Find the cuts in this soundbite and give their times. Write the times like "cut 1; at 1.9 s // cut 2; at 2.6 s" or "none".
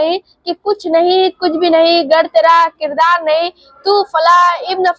none